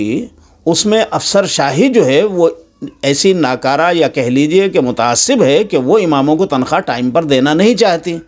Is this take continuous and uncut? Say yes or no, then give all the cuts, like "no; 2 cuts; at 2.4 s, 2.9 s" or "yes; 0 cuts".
yes; 0 cuts